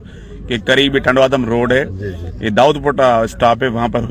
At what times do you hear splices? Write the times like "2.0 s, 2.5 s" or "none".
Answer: none

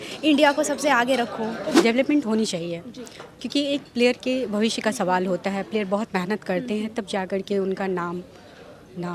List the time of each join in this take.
1.7 s

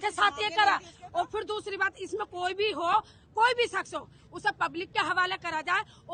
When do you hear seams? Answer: none

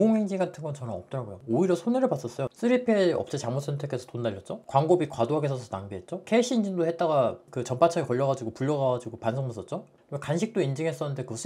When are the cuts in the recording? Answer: none

